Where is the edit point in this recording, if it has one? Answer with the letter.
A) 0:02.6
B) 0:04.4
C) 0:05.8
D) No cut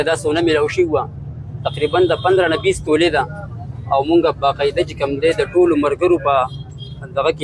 D